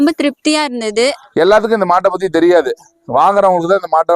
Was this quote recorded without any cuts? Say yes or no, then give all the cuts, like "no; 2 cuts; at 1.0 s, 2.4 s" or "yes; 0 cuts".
no; 1 cut; at 1.2 s